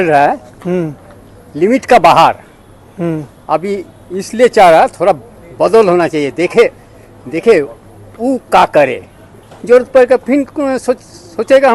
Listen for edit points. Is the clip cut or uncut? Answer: uncut